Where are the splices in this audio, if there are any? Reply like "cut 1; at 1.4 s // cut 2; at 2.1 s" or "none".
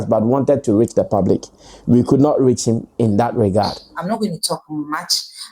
cut 1; at 4.0 s